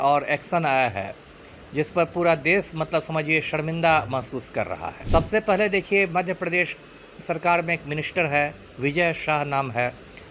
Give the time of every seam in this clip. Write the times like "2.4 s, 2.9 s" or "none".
4.9 s